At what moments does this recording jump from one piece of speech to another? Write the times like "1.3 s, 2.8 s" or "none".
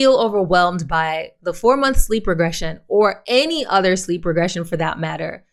none